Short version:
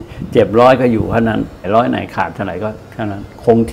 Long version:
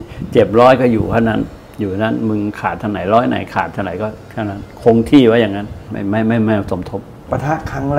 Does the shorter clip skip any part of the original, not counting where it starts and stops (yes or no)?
yes